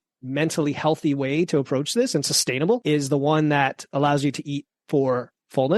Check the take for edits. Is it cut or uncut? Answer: cut